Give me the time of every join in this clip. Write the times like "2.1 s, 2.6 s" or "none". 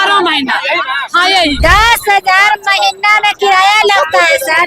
1.6 s